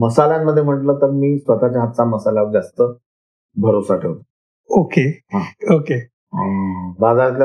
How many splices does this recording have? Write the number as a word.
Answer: zero